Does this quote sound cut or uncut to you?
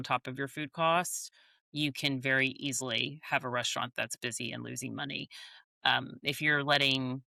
uncut